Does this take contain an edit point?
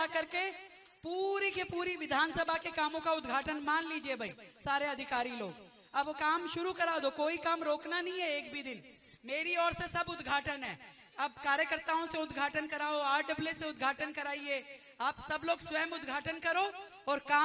no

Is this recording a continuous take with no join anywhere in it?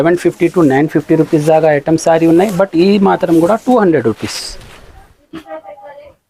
yes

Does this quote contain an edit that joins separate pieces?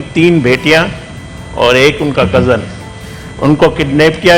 no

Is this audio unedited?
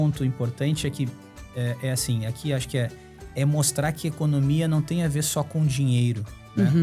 yes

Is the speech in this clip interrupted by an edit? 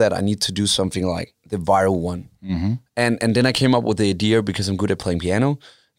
yes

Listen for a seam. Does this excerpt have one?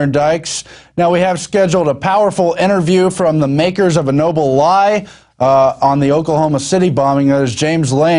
yes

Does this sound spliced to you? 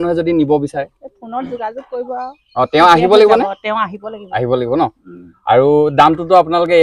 no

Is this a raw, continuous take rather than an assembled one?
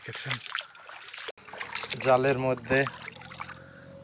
no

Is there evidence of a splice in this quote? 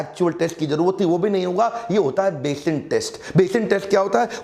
no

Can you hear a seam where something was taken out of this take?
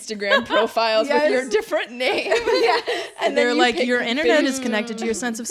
no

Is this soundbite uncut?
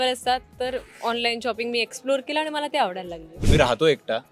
no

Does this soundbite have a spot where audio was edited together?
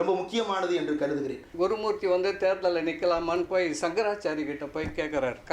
yes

